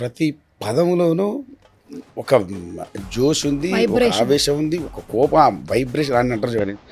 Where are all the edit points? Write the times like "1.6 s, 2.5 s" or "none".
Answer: none